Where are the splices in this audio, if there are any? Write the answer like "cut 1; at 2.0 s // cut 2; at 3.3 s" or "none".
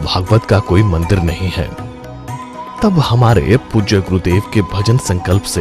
none